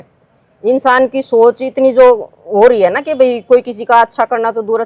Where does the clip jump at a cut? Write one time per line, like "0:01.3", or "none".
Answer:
none